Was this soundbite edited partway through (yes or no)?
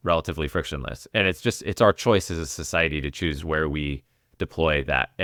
no